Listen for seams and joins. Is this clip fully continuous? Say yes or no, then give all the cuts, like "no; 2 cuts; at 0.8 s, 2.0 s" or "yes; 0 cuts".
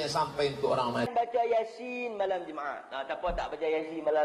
no; 1 cut; at 1.1 s